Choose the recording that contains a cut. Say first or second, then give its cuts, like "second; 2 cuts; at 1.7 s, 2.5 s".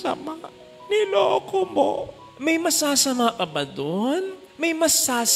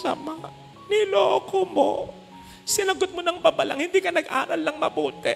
first; 1 cut; at 2.3 s